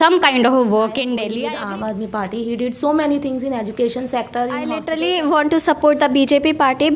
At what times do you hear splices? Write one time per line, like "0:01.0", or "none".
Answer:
0:01.3
0:04.8

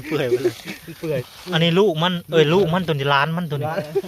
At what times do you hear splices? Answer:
0:01.3

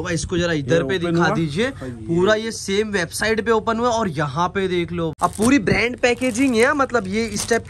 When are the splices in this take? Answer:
0:05.1

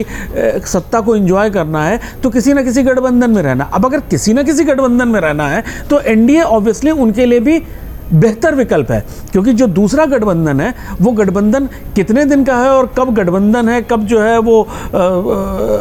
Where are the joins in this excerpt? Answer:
none

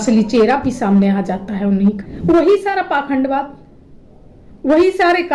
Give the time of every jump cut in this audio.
0:02.1

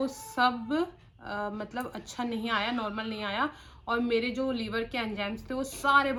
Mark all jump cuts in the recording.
none

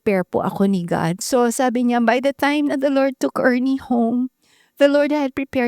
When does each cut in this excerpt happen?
0:01.2

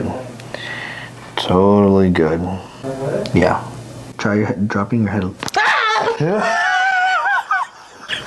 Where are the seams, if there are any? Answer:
none

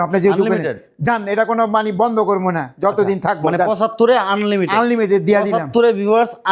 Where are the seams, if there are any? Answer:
none

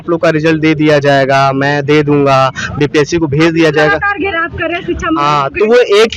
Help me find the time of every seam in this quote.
none

